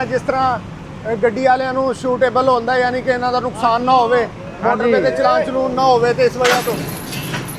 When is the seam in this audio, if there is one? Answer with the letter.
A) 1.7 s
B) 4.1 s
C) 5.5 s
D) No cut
D